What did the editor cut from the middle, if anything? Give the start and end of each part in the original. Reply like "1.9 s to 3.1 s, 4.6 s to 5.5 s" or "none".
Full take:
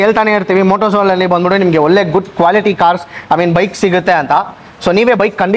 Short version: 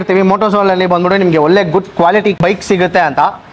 2.8 s to 3.5 s